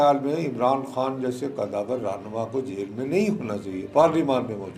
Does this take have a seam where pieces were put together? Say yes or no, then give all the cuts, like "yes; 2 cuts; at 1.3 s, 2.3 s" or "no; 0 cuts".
no; 0 cuts